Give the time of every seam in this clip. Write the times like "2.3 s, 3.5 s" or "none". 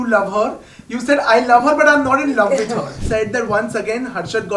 3.0 s